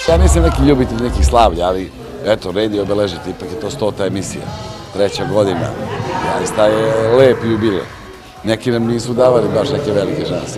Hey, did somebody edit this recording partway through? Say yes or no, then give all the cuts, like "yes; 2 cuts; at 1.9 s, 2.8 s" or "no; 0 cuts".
no; 0 cuts